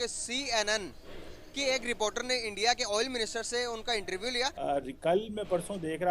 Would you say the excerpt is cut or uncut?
cut